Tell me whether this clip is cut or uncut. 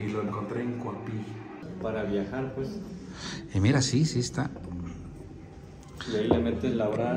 cut